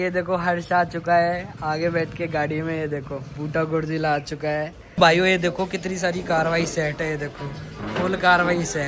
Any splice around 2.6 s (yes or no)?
no